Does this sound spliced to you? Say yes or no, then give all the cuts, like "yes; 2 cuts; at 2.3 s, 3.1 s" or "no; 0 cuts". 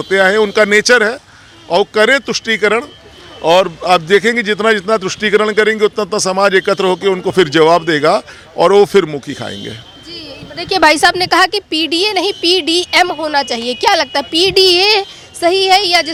no; 0 cuts